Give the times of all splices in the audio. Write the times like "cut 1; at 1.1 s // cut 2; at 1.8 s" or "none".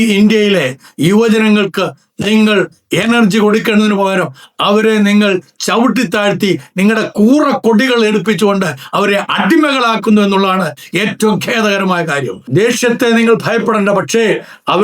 cut 1; at 12.4 s